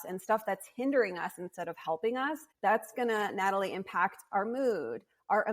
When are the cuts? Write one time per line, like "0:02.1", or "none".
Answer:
0:02.5